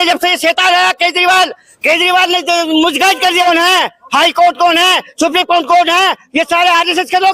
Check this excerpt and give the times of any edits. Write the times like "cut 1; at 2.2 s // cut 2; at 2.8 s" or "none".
cut 1; at 3.4 s